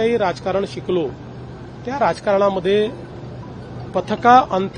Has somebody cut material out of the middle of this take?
no; 0 cuts

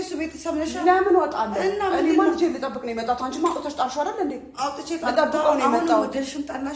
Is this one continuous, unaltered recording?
yes; 0 cuts

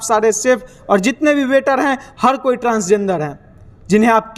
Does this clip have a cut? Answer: no; 0 cuts

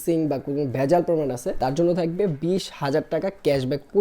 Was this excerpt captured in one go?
no; 1 cut; at 1.5 s

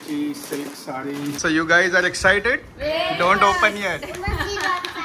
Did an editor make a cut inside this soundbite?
yes; 1 cut; at 1.4 s

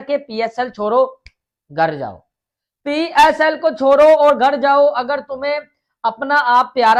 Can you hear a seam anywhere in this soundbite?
no; 0 cuts

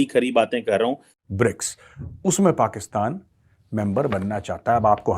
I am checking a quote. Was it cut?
yes; 1 cut; at 1.7 s

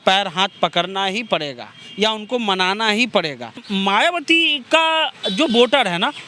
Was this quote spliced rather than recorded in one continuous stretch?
yes; 1 cut; at 3.6 s

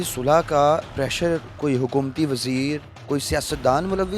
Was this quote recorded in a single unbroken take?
no; 2 cuts; at 0.9 s, 2.9 s

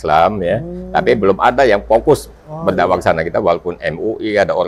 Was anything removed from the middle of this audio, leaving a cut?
no; 0 cuts

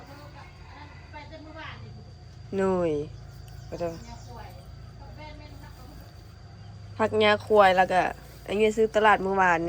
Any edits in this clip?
no; 0 cuts

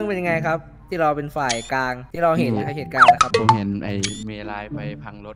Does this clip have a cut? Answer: yes; 3 cuts; at 2.0 s, 3.0 s, 3.6 s

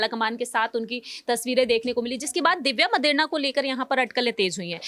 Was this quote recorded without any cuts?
yes; 0 cuts

